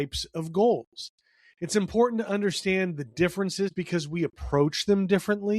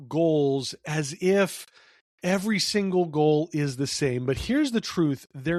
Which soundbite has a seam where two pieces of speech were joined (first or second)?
first